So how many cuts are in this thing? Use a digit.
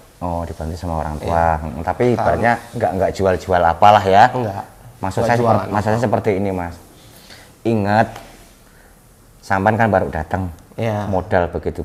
0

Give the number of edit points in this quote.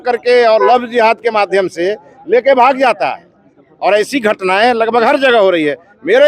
0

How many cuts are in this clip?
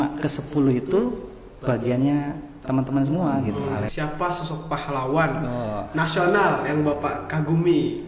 1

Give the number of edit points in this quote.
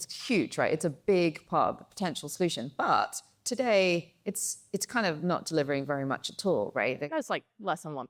0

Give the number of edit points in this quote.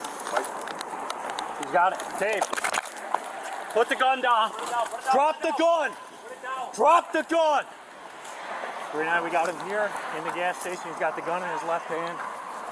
0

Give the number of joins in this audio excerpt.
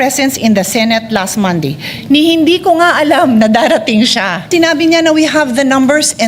1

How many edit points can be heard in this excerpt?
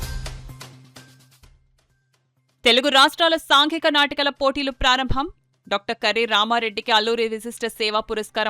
1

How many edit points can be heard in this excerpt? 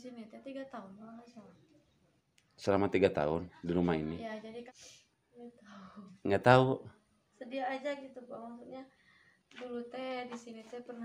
1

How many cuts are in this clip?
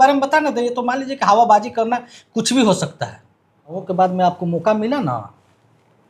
1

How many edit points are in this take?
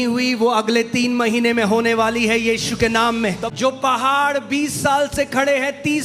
1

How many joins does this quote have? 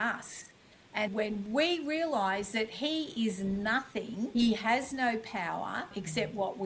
3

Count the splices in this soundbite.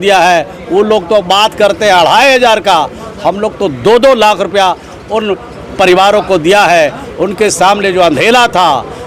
0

